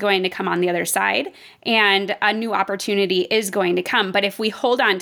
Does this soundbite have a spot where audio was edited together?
no; 0 cuts

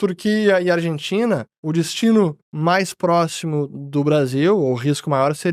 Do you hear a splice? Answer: no; 0 cuts

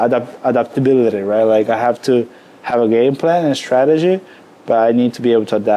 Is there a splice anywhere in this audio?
no; 0 cuts

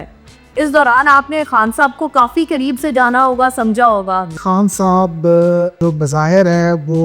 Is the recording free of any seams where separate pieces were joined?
no; 2 cuts; at 4.4 s, 5.7 s

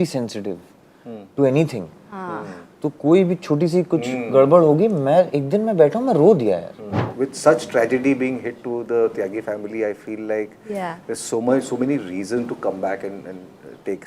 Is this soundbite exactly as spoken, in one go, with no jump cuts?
no; 1 cut; at 7.0 s

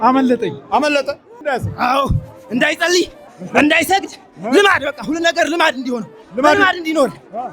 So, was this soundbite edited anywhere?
yes; 1 cut; at 1.3 s

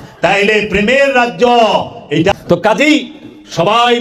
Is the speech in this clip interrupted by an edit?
yes; 1 cut; at 2.3 s

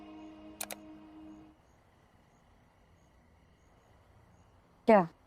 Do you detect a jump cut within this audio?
no; 0 cuts

